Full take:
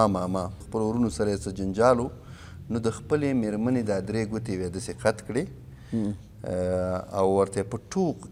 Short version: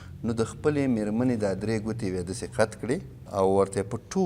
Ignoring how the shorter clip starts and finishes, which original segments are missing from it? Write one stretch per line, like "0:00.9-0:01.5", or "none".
0:05.7-0:07.1